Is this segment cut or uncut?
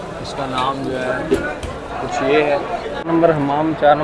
cut